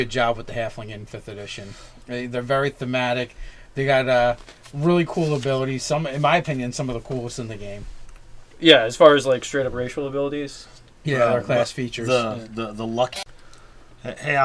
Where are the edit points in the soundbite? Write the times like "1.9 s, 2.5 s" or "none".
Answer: none